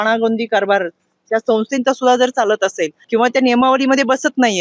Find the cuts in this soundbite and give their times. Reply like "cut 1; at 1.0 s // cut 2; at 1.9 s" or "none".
cut 1; at 2.9 s

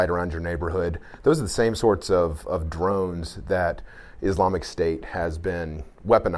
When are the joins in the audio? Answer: none

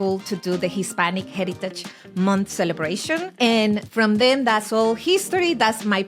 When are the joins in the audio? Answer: cut 1; at 3.3 s // cut 2; at 3.9 s

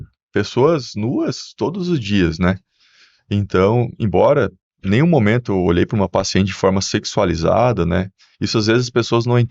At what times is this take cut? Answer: none

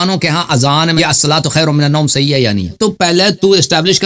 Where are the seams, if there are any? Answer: cut 1; at 0.9 s // cut 2; at 2.7 s

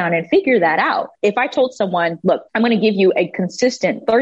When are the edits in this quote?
cut 1; at 1.1 s // cut 2; at 2.5 s

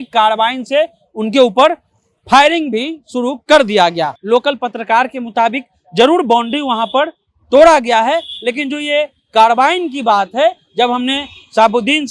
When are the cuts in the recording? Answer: cut 1; at 4.2 s

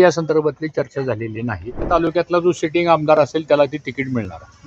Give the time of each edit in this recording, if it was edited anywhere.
cut 1; at 1.9 s

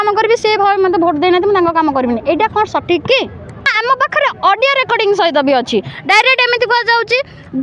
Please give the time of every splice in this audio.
cut 1; at 3.7 s

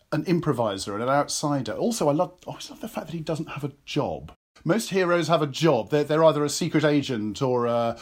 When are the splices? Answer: cut 1; at 4.4 s

